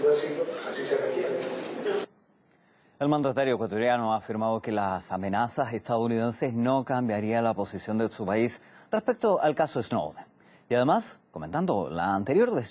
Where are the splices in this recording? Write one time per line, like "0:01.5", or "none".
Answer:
0:09.3

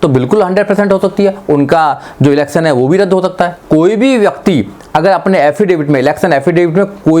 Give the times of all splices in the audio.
0:03.6

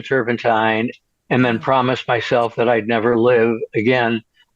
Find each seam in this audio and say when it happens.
0:01.0

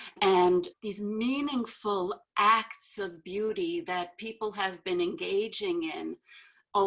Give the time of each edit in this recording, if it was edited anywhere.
none

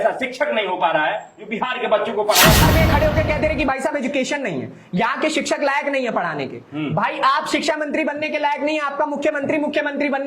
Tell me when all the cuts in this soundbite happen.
0:02.6

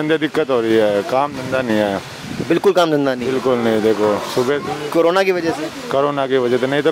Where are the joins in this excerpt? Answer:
none

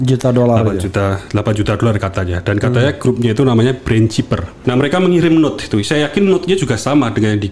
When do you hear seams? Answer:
0:04.5

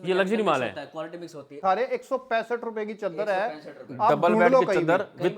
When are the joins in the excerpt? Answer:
0:01.6

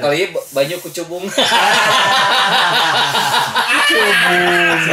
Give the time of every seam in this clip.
none

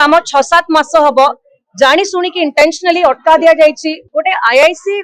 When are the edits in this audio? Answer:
0:04.0

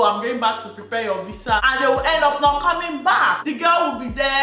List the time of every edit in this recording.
0:01.6

